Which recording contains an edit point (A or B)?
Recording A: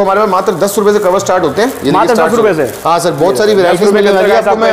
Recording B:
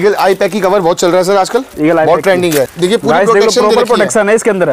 B